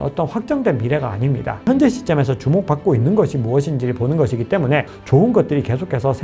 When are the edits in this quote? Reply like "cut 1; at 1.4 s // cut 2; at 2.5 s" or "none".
cut 1; at 1.7 s // cut 2; at 5.0 s

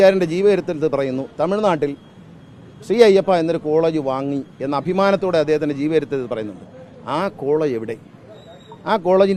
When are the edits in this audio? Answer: none

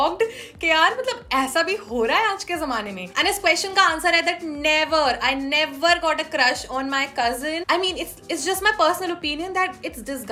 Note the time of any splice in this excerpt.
none

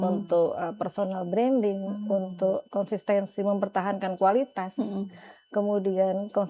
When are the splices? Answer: none

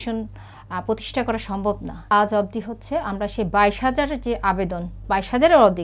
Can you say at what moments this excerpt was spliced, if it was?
cut 1; at 2.0 s

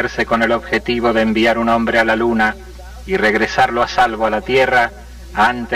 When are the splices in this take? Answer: cut 1; at 4.4 s

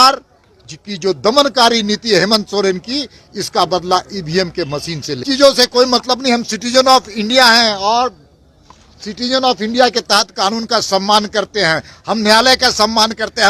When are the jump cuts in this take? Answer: cut 1; at 5.2 s

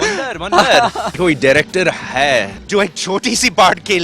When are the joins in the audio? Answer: cut 1; at 1.2 s // cut 2; at 2.6 s

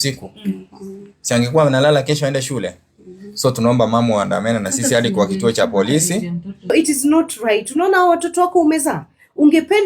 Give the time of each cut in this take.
cut 1; at 6.7 s

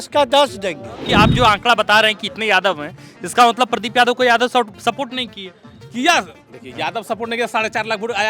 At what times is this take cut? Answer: cut 1; at 0.9 s

